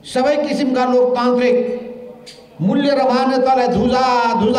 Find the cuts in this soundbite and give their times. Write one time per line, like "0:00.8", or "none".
none